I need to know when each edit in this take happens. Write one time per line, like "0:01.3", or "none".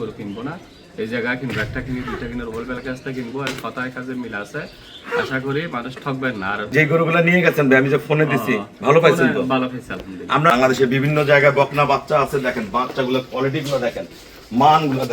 0:06.7
0:10.5